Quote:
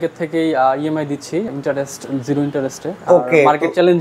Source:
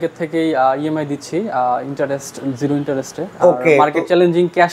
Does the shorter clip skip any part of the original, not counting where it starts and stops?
yes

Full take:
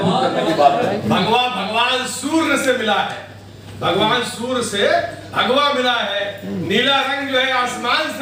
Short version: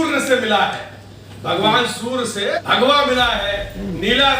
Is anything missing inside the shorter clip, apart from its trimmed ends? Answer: yes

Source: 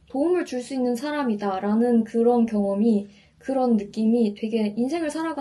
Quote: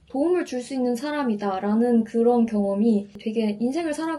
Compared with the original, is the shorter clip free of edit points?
no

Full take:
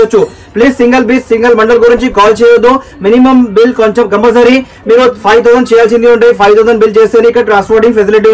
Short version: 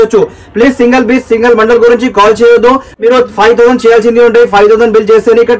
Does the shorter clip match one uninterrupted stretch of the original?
no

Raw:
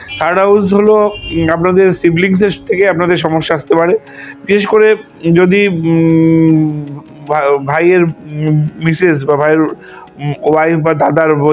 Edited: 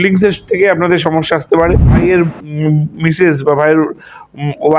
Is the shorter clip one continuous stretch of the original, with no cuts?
no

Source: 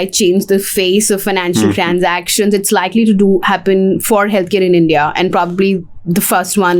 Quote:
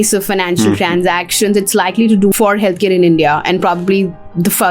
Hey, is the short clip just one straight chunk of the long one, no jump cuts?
no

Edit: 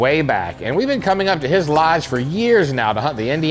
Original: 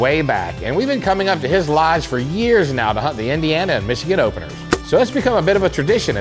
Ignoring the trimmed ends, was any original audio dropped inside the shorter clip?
no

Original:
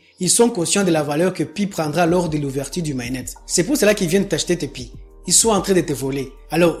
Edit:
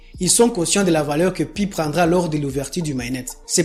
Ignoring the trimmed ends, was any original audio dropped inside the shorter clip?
no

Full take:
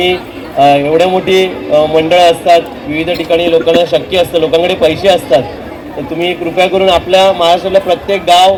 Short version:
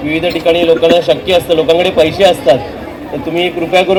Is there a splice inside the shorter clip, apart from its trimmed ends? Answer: no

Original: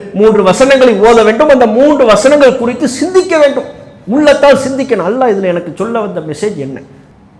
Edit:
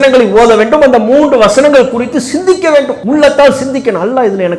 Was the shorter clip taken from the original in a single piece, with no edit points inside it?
no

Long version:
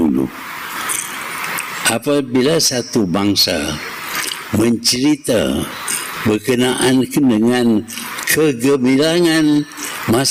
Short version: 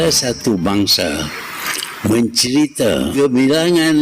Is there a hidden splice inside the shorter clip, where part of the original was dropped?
yes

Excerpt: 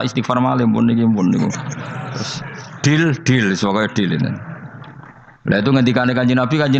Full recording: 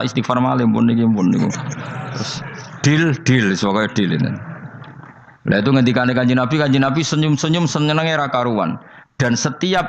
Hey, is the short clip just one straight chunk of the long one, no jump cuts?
yes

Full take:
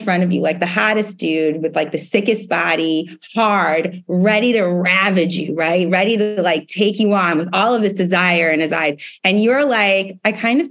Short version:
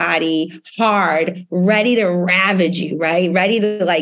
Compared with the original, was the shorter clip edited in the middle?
no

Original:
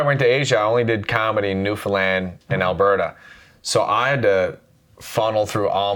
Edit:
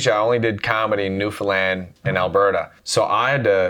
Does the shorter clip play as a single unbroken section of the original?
no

